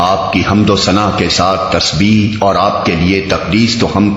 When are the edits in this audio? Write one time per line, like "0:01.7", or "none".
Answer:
none